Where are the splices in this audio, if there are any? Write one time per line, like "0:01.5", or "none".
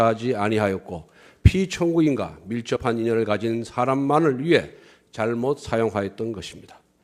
0:05.6